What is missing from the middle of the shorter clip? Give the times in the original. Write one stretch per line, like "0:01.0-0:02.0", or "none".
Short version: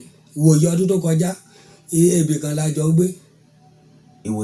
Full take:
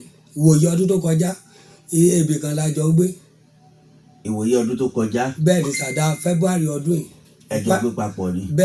none